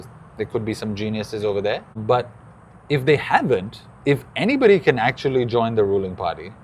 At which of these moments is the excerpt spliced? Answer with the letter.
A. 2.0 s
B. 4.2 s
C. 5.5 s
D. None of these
A